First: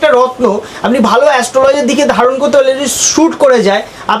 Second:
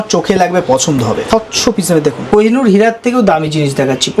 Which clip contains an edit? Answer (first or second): second